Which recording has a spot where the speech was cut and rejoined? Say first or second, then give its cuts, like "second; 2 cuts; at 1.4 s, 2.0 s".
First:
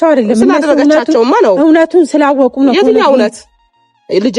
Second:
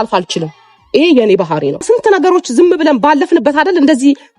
second; 1 cut; at 1.8 s